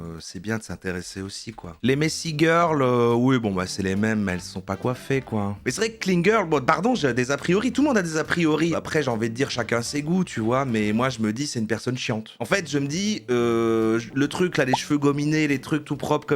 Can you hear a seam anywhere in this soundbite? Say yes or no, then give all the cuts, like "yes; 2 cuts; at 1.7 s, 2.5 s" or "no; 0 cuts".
yes; 4 cuts; at 1.7 s, 5.6 s, 8.7 s, 12.3 s